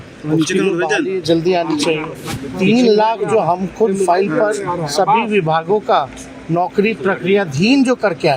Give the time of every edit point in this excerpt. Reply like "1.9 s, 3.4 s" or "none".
2.4 s

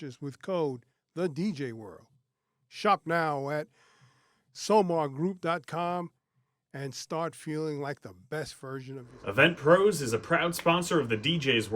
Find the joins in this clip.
9.1 s

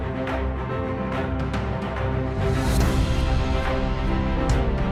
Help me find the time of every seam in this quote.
none

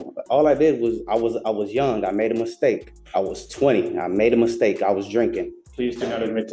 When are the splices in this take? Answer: 2.9 s, 5.6 s

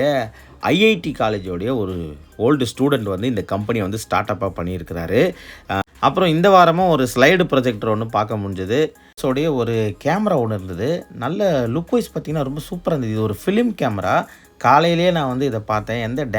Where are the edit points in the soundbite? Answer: 5.8 s, 9.2 s

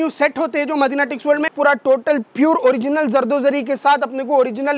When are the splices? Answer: 1.5 s

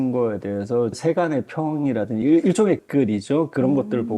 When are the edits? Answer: 1.0 s, 2.2 s, 2.8 s

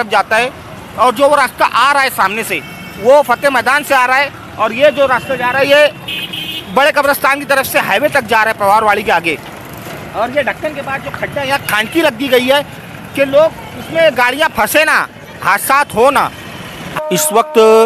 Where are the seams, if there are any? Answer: 16.9 s

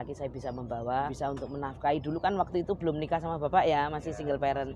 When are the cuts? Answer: 1.1 s

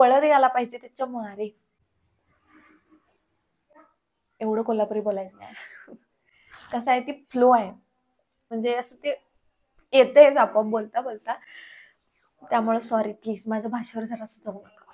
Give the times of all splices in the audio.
1.9 s, 8.5 s

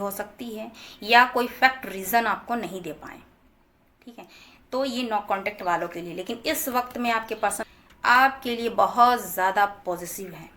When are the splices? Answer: none

